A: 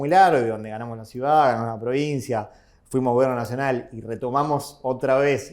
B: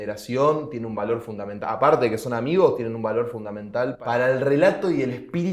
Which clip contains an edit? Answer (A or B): B